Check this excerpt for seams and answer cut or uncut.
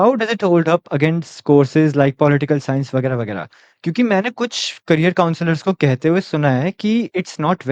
uncut